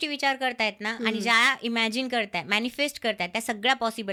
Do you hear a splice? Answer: no; 0 cuts

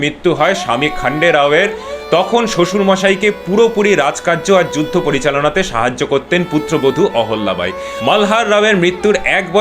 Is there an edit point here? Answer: no; 0 cuts

